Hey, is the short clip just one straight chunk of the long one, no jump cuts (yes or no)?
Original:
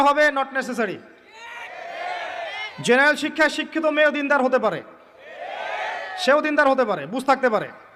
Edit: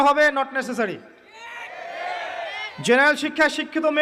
yes